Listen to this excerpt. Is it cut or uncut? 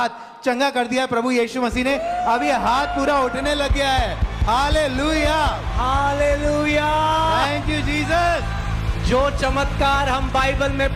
uncut